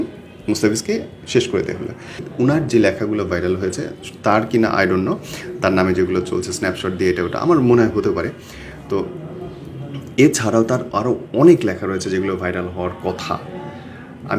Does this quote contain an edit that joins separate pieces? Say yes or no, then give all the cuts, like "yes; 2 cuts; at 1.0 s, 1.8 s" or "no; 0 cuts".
yes; 1 cut; at 2.2 s